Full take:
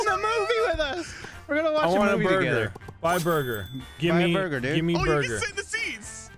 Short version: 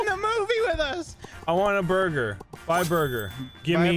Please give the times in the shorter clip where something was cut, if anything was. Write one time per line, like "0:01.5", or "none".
0:01.5